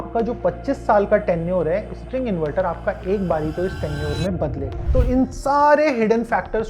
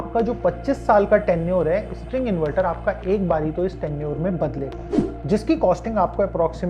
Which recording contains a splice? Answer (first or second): first